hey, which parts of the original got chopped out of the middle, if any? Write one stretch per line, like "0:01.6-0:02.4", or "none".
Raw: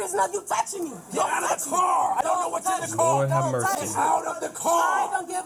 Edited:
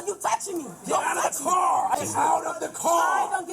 0:02.2-0:03.8